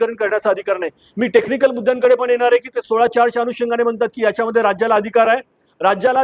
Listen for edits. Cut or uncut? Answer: uncut